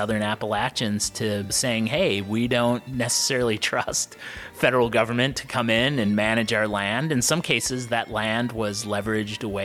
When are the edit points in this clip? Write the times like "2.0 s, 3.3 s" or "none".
none